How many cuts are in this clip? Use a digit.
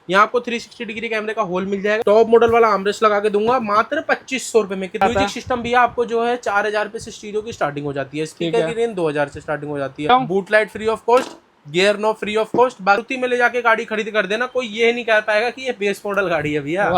4